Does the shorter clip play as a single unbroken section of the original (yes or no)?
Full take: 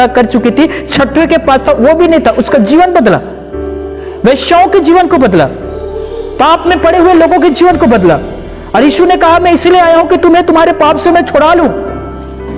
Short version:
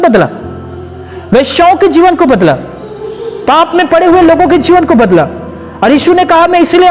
yes